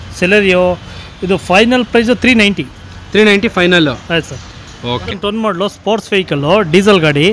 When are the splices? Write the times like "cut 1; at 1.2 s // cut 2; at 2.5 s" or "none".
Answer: cut 1; at 5.2 s